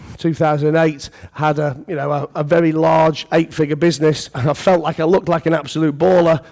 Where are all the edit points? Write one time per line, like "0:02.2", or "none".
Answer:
0:04.3